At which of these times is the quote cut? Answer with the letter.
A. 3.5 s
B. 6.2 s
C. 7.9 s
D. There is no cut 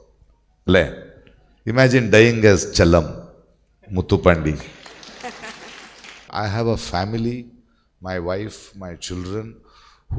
B